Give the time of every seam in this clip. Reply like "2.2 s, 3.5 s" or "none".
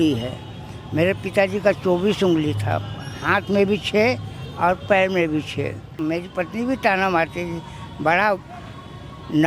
6.0 s